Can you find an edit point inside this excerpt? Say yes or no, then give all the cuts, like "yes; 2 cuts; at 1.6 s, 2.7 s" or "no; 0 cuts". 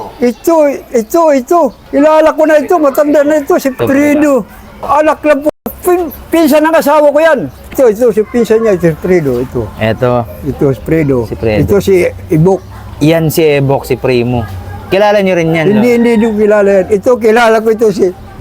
no; 0 cuts